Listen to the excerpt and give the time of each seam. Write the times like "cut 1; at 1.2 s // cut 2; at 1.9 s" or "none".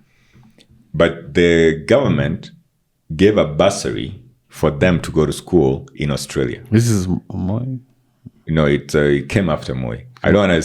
none